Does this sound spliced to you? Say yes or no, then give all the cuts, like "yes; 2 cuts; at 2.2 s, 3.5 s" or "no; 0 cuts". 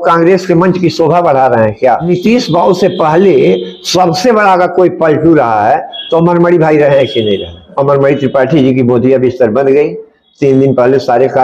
yes; 2 cuts; at 2.0 s, 7.7 s